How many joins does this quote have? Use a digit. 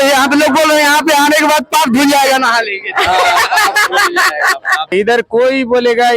1